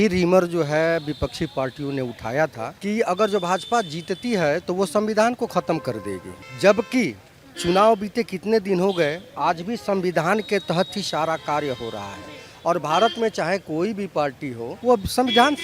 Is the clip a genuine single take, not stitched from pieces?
no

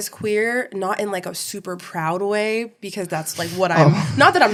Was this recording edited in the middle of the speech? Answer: no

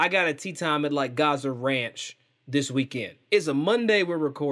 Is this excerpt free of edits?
yes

